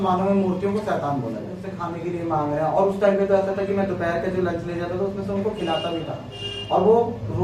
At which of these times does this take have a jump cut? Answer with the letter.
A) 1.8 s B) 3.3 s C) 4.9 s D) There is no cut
A